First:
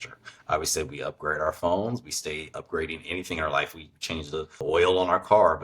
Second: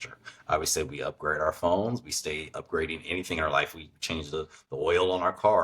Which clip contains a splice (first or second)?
first